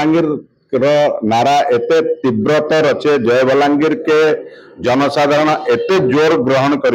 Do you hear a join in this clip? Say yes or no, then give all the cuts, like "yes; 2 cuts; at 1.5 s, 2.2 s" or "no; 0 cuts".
no; 0 cuts